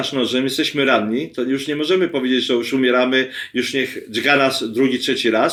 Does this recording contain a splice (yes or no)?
no